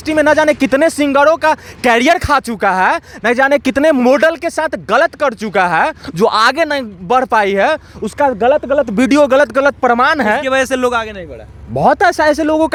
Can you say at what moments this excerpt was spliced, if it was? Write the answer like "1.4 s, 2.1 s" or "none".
none